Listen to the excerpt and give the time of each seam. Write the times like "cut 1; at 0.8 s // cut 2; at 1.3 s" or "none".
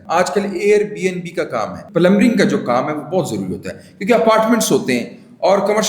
cut 1; at 1.8 s